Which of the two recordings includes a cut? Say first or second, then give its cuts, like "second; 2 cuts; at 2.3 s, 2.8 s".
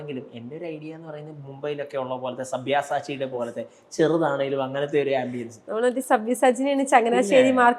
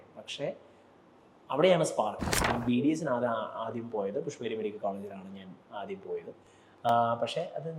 second; 1 cut; at 2.4 s